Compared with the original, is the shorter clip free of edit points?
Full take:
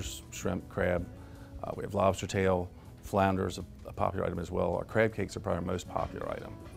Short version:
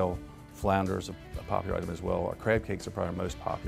yes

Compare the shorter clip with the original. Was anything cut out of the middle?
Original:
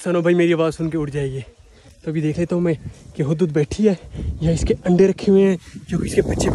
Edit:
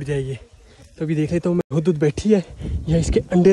yes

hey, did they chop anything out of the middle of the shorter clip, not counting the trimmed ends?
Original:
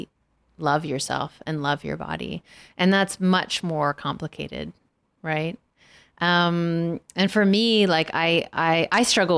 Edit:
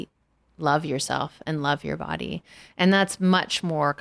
no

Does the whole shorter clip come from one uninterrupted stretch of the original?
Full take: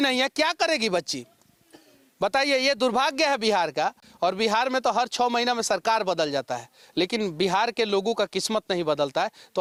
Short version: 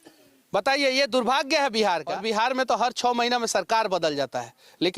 no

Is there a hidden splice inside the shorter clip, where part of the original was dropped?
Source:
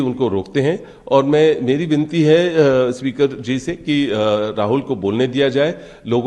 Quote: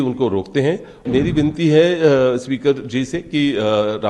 yes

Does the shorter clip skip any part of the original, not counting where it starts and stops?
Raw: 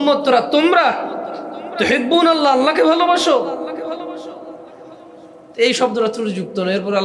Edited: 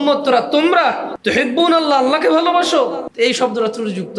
yes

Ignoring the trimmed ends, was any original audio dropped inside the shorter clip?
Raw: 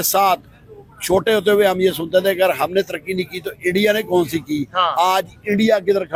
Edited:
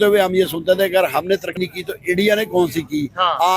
yes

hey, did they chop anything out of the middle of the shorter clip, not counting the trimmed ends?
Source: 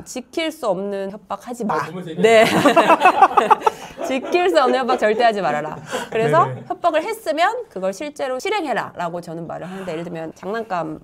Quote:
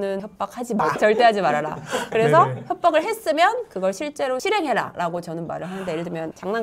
yes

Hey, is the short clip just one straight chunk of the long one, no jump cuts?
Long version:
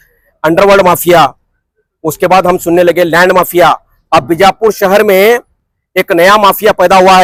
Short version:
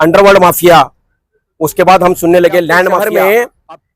no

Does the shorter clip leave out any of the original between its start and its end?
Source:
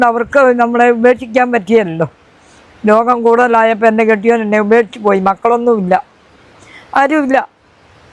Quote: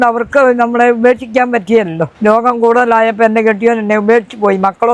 yes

